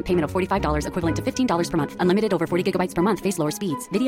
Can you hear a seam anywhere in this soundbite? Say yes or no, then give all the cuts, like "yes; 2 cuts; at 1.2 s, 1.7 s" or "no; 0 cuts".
no; 0 cuts